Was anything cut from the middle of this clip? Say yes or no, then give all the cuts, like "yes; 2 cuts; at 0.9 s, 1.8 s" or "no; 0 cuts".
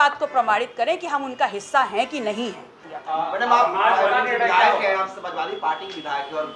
yes; 1 cut; at 2.9 s